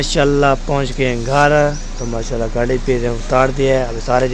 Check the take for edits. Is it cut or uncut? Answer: uncut